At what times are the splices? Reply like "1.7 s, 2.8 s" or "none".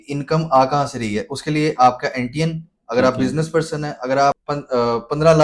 4.5 s